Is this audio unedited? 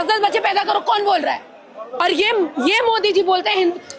no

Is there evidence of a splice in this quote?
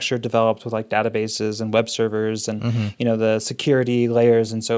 no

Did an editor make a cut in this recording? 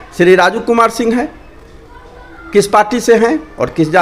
no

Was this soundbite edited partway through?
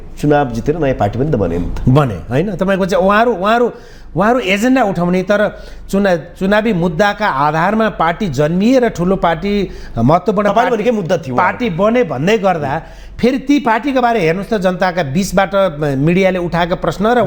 no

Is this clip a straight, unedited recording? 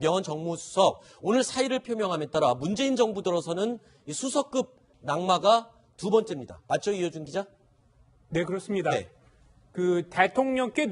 no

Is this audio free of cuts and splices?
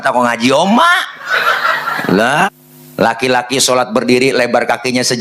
no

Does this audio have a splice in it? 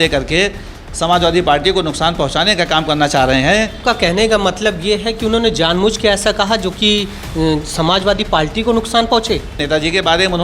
yes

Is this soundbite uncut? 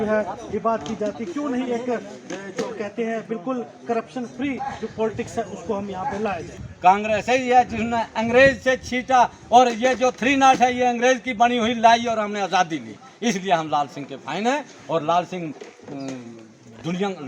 no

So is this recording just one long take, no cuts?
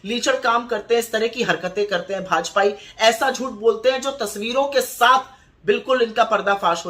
yes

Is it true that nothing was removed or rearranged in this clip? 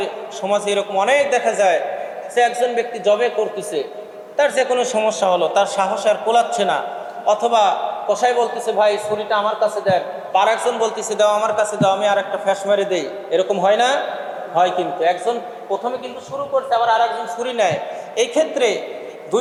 yes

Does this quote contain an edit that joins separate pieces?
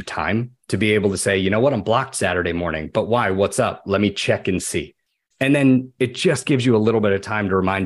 no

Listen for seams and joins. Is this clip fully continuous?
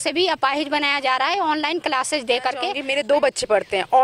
no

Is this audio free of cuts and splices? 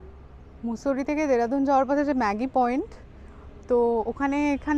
yes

